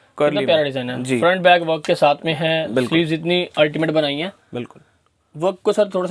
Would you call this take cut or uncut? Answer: uncut